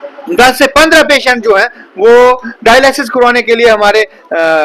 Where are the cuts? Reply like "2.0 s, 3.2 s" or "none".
none